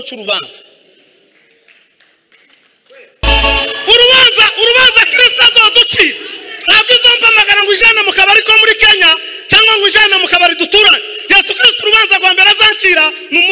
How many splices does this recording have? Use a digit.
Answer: 1